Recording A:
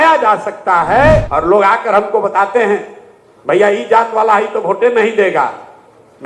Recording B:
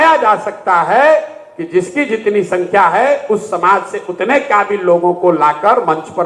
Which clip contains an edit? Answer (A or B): A